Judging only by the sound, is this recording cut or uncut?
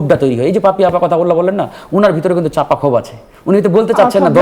uncut